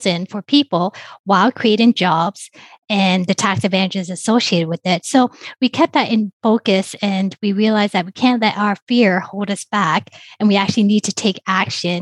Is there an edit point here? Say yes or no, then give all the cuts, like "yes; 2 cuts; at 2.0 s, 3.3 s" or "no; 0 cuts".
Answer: no; 0 cuts